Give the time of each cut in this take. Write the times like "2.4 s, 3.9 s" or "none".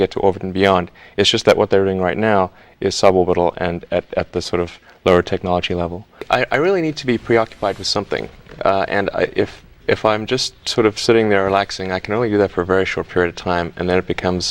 6.1 s